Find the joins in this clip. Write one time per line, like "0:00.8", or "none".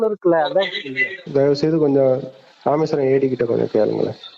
0:01.2